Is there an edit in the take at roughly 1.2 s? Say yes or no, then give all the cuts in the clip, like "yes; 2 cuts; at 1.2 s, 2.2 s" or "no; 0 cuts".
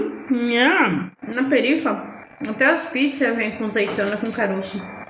yes; 1 cut; at 1.2 s